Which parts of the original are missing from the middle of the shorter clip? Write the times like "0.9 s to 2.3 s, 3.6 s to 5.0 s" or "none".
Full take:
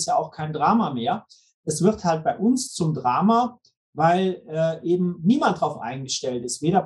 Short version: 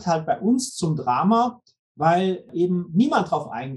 4.5 s to 4.8 s